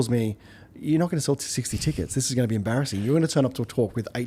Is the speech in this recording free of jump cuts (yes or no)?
yes